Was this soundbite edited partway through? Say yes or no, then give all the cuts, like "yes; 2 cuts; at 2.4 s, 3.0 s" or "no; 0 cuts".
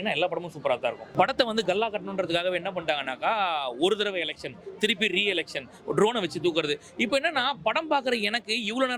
yes; 1 cut; at 1.0 s